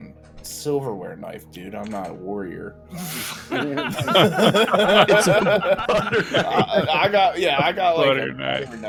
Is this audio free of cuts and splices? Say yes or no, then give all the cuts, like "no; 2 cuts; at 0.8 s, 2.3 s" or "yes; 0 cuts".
yes; 0 cuts